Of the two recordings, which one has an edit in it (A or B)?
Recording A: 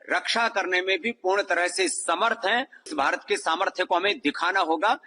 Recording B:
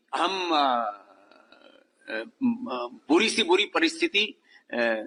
A